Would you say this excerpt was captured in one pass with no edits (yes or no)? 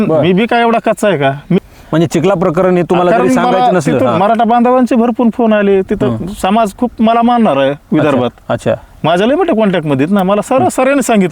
no